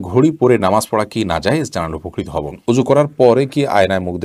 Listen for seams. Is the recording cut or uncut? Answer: cut